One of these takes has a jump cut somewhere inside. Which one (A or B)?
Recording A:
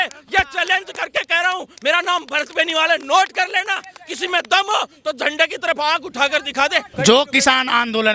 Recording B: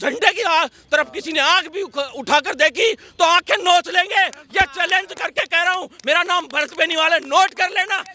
A